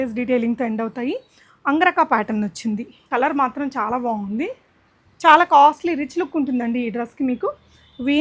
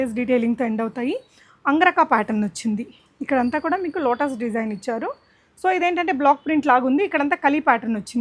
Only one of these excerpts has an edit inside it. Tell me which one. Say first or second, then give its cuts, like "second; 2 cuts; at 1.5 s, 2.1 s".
first; 1 cut; at 3.0 s